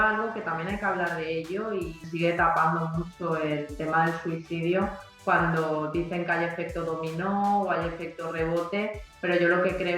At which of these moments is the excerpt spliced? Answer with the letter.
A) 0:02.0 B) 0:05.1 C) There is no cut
A